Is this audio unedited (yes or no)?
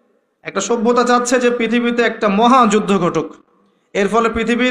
yes